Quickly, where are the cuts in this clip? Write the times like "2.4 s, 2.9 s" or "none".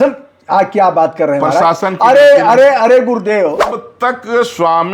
3.8 s